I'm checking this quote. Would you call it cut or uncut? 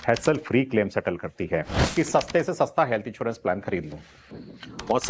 cut